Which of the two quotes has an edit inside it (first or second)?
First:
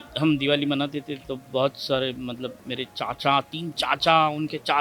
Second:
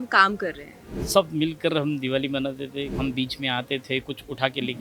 second